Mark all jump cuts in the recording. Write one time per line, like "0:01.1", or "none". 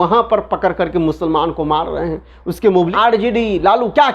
0:02.9